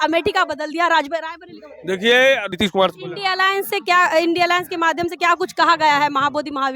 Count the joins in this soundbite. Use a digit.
1